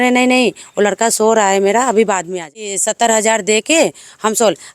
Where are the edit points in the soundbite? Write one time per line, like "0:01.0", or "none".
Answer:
0:02.8